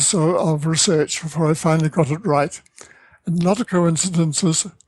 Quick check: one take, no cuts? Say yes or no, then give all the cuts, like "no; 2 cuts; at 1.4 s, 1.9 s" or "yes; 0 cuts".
yes; 0 cuts